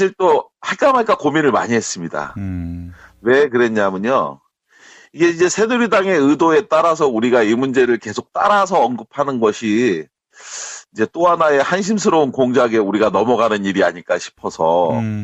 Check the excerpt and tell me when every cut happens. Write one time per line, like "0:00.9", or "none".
0:04.2